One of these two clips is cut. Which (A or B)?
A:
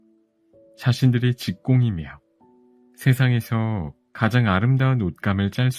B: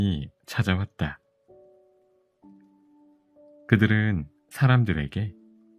B